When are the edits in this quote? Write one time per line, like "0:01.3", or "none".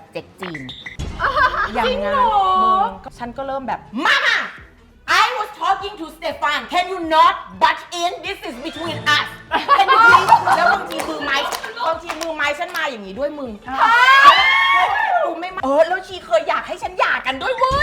0:03.0
0:15.5